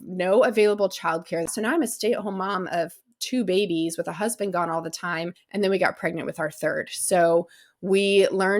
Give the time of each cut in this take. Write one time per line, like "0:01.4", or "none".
0:01.5
0:05.4